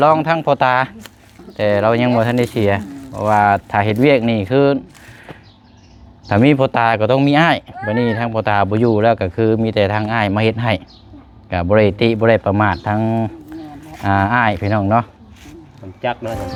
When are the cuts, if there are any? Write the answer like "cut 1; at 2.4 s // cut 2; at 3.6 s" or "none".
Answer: none